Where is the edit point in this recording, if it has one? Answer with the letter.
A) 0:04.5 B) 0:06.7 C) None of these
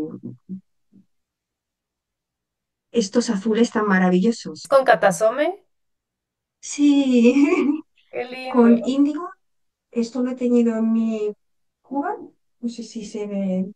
A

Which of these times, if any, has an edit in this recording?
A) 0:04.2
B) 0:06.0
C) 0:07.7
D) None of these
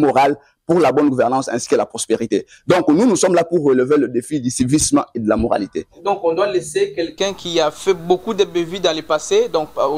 B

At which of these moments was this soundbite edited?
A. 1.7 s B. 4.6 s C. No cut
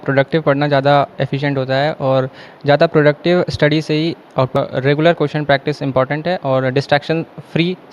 B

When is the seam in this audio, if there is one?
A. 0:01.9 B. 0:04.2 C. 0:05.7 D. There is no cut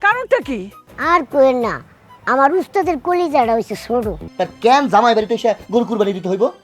B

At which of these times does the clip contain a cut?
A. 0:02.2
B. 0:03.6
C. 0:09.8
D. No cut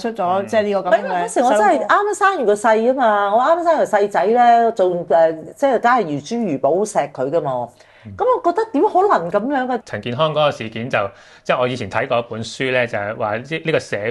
C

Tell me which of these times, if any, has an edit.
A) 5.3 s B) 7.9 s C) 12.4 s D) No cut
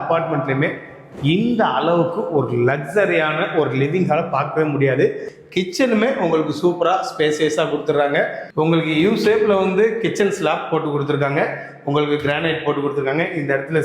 A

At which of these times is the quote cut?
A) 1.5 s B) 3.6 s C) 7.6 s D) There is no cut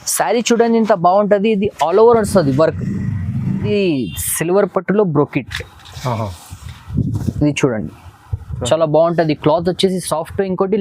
B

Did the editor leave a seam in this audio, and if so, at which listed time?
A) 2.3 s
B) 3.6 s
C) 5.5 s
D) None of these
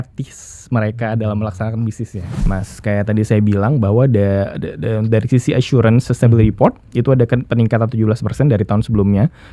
A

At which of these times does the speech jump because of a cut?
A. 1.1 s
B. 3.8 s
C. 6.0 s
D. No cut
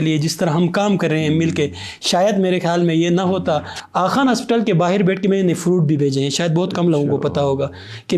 B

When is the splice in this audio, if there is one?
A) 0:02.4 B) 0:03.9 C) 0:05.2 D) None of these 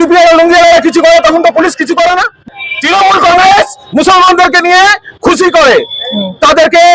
A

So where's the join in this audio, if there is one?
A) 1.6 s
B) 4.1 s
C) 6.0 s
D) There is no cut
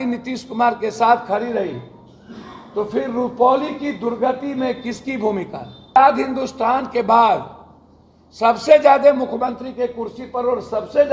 C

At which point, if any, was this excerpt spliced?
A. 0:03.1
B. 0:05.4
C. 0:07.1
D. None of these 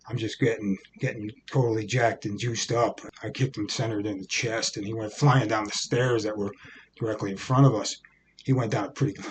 A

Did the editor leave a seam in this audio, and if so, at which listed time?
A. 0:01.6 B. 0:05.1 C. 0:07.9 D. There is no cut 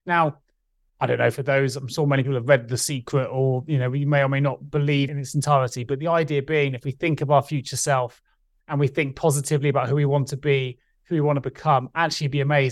B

